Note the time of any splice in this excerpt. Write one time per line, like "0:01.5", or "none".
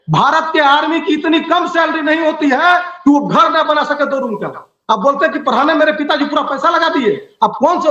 none